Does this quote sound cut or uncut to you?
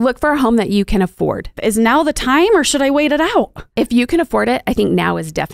cut